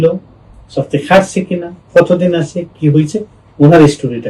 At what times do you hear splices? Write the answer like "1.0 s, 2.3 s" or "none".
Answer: none